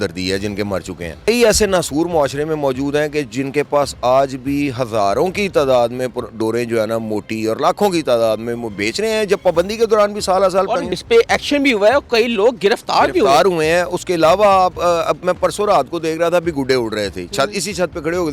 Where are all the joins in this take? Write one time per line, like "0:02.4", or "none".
0:01.3
0:10.8